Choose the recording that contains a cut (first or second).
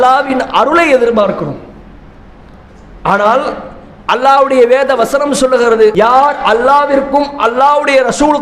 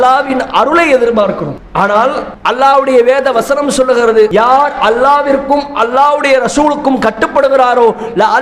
second